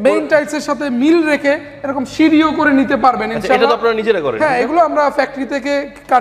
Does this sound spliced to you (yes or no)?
no